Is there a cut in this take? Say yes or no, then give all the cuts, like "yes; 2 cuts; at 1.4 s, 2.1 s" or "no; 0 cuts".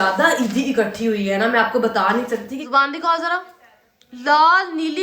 yes; 1 cut; at 2.5 s